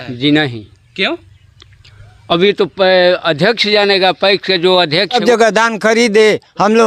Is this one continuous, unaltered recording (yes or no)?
no